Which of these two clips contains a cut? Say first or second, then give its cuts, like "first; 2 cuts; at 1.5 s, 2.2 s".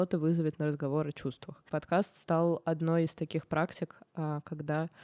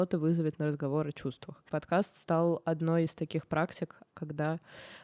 second; 1 cut; at 4.1 s